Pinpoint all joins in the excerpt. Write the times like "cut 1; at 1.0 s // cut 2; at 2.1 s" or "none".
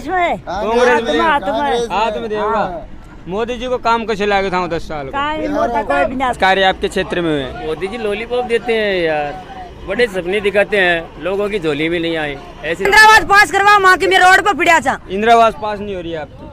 cut 1; at 6.4 s // cut 2; at 12.9 s

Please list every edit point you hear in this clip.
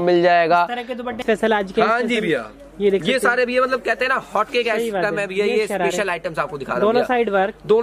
cut 1; at 1.2 s

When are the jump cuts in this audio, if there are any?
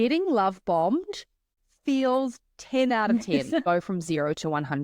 cut 1; at 1.6 s // cut 2; at 3.6 s

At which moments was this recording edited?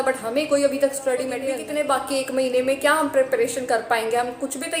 cut 1; at 1.5 s

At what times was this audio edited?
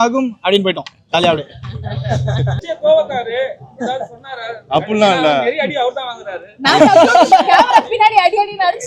cut 1; at 2.6 s

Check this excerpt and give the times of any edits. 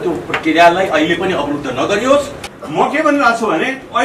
cut 1; at 2.4 s

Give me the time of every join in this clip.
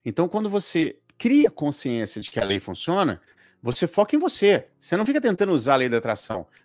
cut 1; at 1.0 s

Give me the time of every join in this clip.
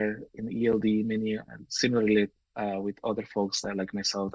none

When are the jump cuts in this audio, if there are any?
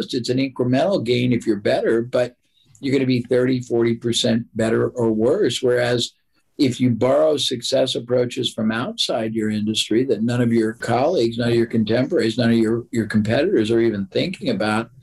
none

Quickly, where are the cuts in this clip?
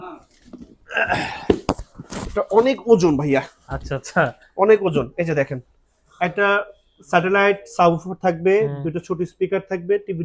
none

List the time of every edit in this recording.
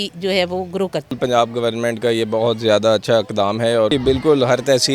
cut 1; at 1.2 s // cut 2; at 3.9 s

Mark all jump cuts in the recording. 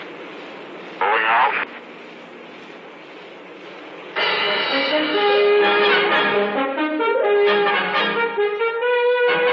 cut 1; at 2.8 s

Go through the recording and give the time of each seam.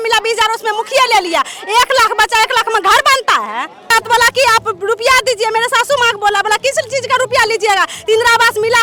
none

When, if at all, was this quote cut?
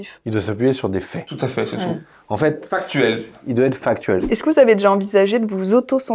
cut 1; at 4.2 s

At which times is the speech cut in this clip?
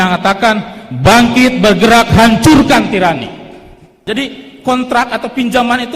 cut 1; at 4.0 s

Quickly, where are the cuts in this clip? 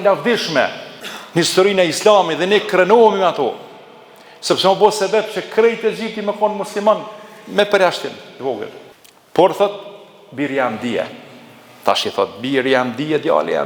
none

